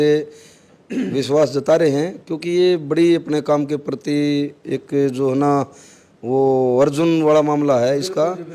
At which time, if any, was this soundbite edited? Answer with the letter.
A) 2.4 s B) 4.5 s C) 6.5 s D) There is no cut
D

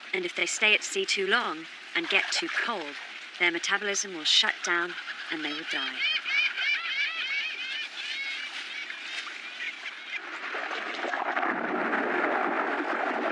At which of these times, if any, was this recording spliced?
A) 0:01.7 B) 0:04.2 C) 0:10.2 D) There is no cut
A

